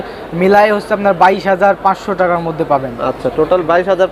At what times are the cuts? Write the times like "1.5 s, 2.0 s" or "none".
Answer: none

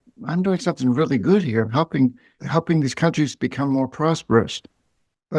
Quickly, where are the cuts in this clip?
2.3 s

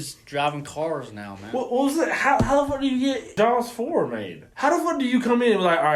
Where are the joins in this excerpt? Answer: 3.3 s, 4.5 s

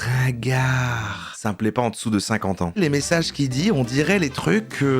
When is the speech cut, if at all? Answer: 1.2 s, 2.8 s

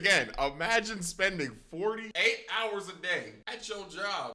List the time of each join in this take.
2.1 s

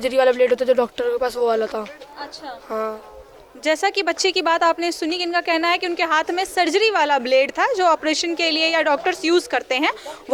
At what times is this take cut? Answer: none

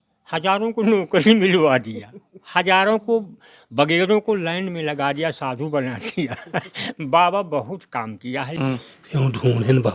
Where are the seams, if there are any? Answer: 8.5 s

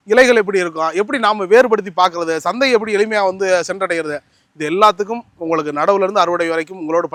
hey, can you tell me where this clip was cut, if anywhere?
none

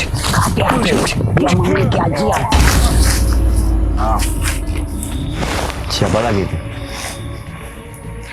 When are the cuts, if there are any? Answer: 5.3 s

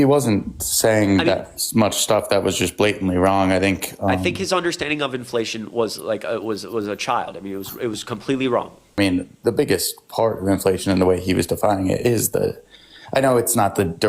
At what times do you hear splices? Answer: 9.0 s

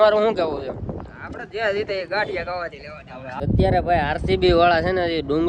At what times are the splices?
3.3 s

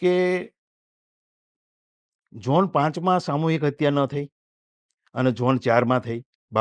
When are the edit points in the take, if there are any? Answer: none

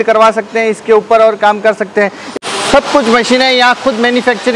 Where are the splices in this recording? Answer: 2.2 s

